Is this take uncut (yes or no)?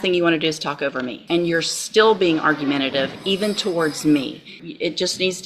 no